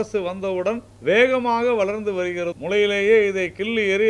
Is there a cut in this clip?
yes; 2 cuts; at 0.9 s, 2.5 s

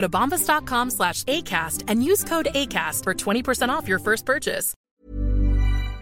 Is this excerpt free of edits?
no; 1 cut; at 4.7 s

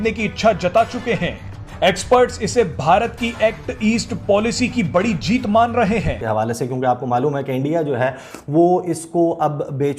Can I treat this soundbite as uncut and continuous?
no; 1 cut; at 6.1 s

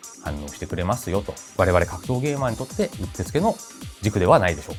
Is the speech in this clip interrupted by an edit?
no; 0 cuts

